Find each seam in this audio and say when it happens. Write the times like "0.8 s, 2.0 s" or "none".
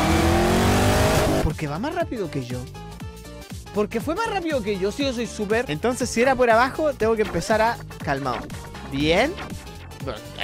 5.7 s